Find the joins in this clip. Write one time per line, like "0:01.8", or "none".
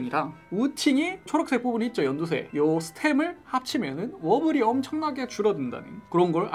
none